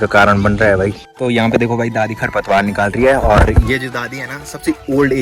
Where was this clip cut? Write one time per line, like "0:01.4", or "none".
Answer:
0:01.1